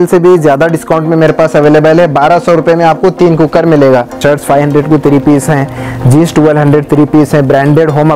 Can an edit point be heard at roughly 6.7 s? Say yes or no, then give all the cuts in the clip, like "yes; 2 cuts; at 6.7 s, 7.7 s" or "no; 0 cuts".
no; 1 cut; at 4.1 s